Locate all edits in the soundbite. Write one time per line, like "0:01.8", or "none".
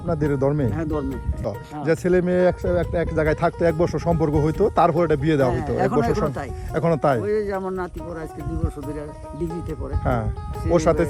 0:01.6

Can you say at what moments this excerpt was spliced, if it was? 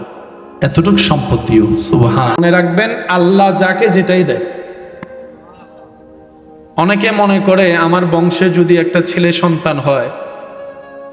0:02.4

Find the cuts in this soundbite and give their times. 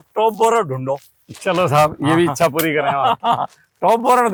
none

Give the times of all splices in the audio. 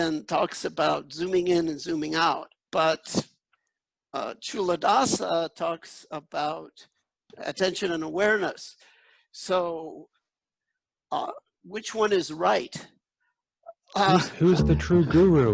0:02.6
0:07.2

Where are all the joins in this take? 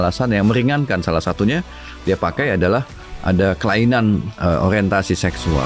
none

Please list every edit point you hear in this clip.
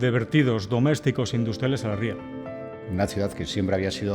0:02.7

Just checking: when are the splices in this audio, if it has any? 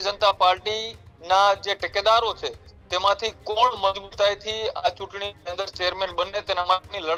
none

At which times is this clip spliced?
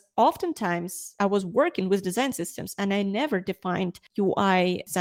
0:01.2

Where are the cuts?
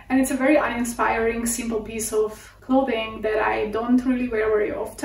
none

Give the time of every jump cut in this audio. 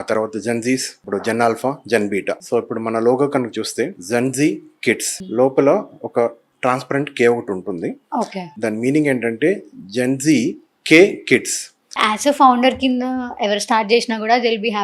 0:01.0
0:02.4
0:04.0
0:05.2
0:06.5
0:08.5
0:12.0

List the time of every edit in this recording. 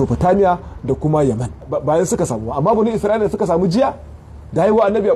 0:01.7

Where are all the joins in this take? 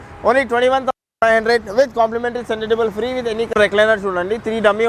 0:03.5

